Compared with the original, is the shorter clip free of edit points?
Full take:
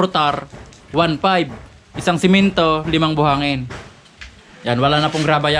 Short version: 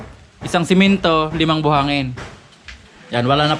yes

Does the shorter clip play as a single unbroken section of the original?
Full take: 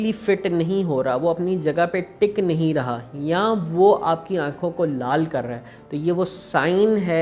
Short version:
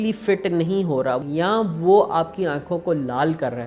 no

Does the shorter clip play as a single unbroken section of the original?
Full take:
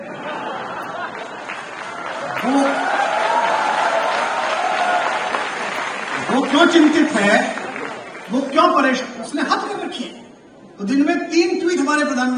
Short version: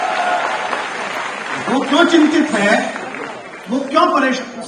yes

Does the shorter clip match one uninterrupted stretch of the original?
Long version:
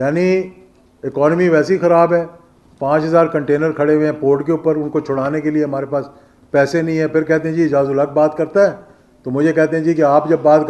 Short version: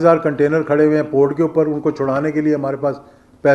yes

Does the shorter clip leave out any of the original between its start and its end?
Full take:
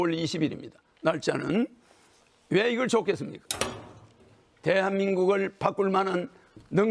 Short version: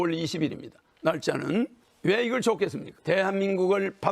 yes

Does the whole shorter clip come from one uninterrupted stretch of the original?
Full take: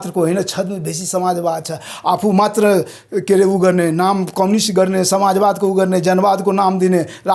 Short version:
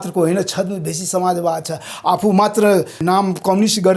no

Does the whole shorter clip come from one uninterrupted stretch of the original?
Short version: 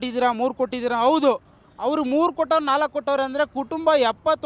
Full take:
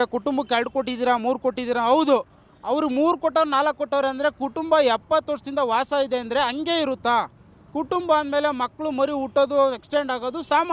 yes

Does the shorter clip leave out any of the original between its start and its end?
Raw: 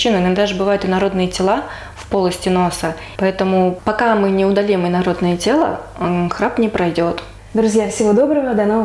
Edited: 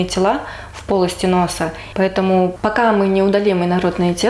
no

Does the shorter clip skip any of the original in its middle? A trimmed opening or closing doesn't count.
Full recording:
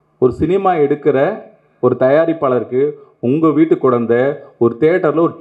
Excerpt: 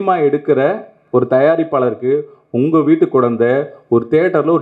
yes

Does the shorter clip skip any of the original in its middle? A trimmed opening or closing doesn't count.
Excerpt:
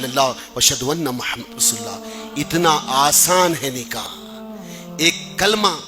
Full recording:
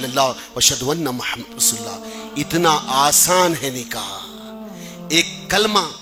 yes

